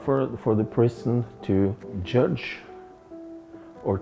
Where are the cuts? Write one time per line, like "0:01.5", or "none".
0:02.0

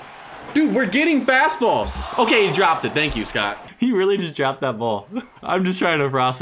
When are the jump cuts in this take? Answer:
0:03.6

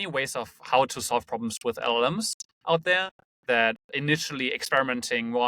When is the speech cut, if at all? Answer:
none

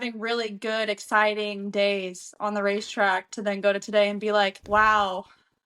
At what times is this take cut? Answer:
0:04.6

